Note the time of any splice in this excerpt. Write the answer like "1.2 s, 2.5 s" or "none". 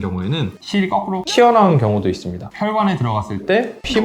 2.5 s